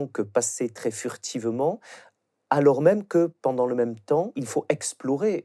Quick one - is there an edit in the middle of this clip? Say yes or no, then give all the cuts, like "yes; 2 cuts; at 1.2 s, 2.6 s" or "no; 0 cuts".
yes; 1 cut; at 4.4 s